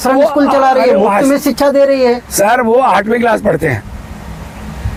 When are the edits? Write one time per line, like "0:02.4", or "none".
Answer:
none